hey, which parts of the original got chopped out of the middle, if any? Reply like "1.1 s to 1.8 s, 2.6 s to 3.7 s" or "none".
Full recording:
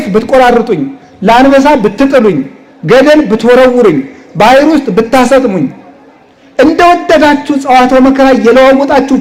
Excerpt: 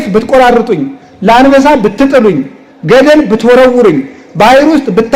none

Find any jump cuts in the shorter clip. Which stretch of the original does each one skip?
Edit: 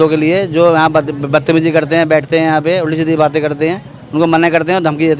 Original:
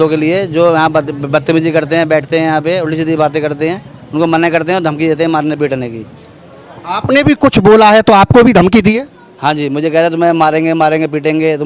none

